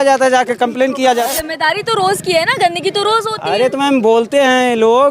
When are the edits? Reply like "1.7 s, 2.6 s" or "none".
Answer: 1.3 s